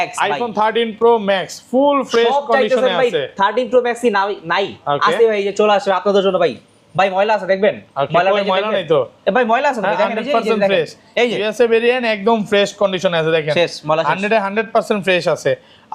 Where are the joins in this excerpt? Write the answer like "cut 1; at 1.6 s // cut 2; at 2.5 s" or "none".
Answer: none